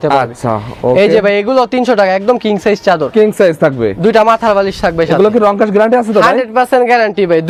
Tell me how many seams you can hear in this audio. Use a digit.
0